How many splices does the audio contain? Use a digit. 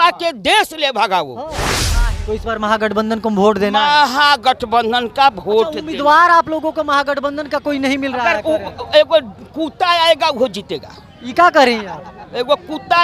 1